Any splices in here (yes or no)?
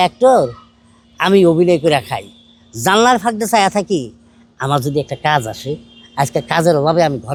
no